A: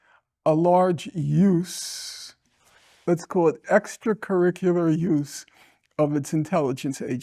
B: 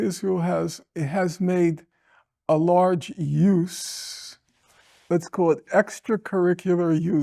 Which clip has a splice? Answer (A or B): B